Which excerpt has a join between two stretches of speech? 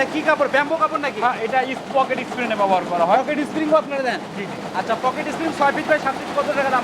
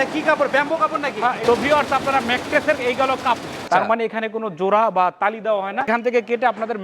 second; 3 cuts; at 1.4 s, 3.6 s, 5.9 s

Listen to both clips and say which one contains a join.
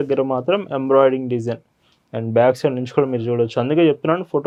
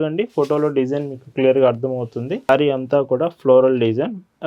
second; 1 cut; at 2.5 s

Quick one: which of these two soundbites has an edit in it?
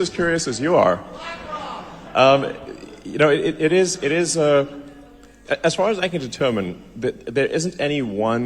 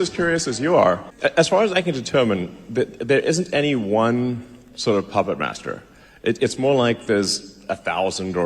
second; 1 cut; at 1.1 s

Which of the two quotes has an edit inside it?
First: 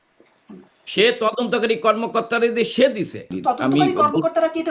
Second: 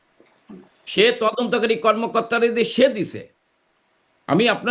first; 1 cut; at 3.3 s

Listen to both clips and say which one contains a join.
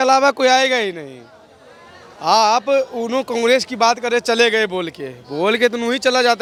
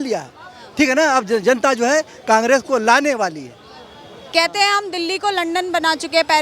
second; 1 cut; at 4.3 s

